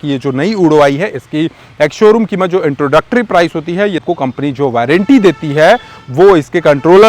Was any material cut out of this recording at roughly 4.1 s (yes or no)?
yes